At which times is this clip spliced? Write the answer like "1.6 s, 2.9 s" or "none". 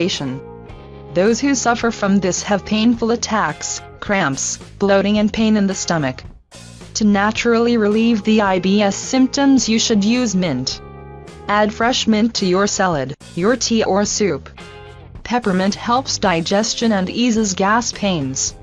12.4 s

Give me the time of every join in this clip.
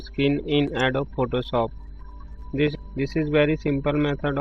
2.8 s

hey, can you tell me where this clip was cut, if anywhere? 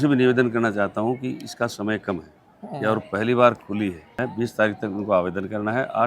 4.2 s

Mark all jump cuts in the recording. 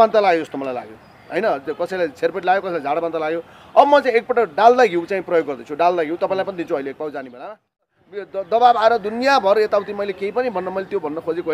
7.9 s

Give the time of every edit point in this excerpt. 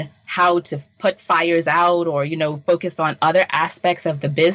none

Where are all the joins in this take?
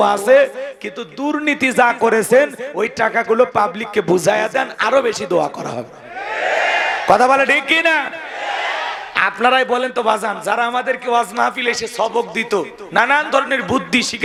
none

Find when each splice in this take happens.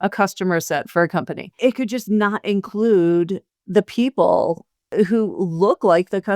4.8 s

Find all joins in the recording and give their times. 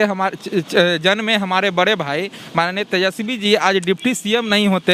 none

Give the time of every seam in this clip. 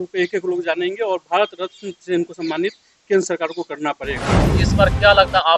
4.6 s

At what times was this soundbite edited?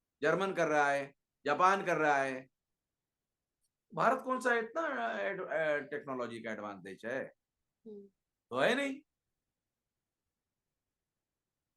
none

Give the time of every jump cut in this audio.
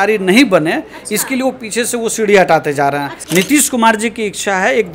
3.1 s

